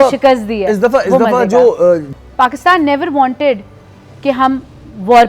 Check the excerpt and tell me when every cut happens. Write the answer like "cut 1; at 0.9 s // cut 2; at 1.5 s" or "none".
cut 1; at 2.1 s